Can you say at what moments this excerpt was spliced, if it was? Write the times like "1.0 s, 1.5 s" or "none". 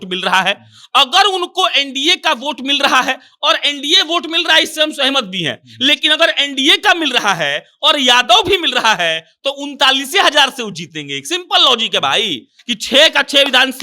12.5 s